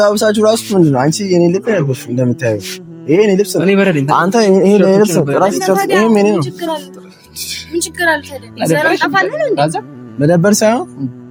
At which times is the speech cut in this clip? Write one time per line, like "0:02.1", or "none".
none